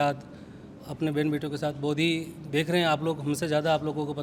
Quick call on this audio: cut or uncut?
uncut